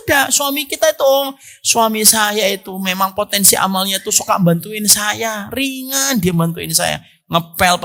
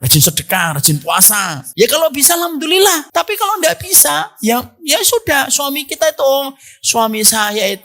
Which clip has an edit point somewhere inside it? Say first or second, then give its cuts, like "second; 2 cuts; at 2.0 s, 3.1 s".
second; 2 cuts; at 1.6 s, 3.1 s